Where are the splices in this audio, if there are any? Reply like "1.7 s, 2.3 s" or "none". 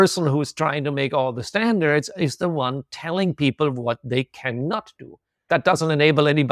5.5 s